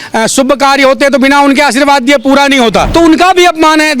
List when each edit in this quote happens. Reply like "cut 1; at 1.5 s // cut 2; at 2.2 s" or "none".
cut 1; at 2.9 s